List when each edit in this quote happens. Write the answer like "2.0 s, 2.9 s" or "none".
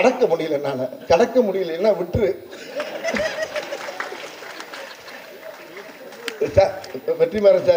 none